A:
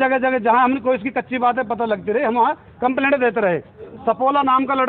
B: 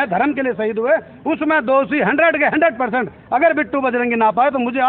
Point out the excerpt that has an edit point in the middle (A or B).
A